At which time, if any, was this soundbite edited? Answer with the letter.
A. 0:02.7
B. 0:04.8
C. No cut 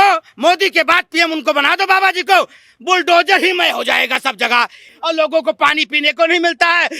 B